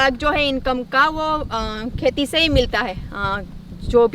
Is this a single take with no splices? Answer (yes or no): yes